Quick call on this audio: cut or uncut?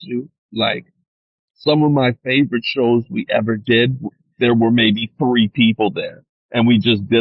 uncut